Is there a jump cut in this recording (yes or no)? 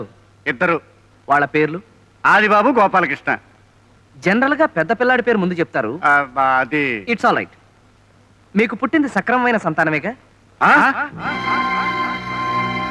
no